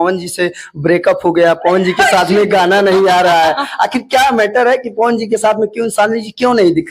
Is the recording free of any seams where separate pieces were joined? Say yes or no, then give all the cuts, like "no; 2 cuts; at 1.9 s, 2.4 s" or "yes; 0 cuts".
yes; 0 cuts